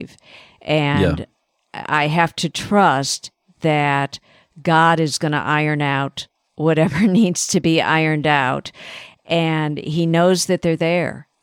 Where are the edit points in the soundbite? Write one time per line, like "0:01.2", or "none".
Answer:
none